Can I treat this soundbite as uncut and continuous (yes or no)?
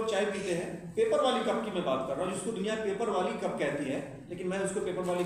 yes